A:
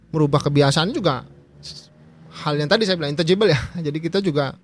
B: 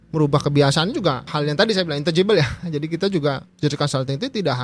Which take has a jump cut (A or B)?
B